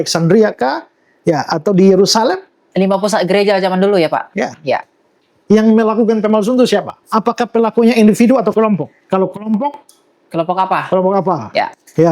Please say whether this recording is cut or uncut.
cut